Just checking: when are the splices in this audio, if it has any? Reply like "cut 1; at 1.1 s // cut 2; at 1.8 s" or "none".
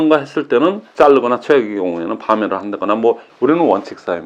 cut 1; at 0.8 s // cut 2; at 3.2 s